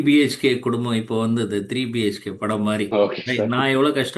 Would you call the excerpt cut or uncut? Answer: cut